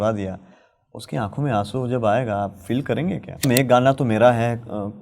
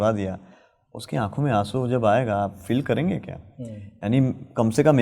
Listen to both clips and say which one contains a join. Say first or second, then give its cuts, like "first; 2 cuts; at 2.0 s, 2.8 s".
first; 1 cut; at 3.5 s